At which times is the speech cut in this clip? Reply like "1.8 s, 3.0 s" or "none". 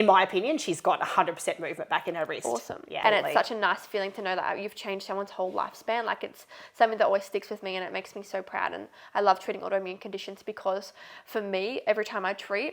2.9 s